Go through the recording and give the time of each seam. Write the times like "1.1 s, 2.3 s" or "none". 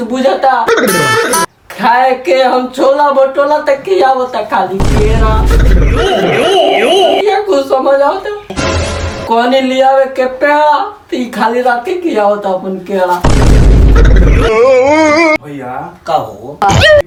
none